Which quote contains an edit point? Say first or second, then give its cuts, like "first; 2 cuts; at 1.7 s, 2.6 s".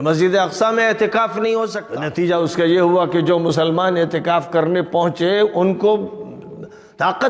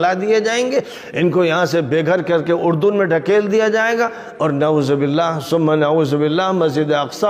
first; 1 cut; at 1.9 s